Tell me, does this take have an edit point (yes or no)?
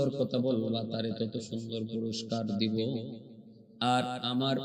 no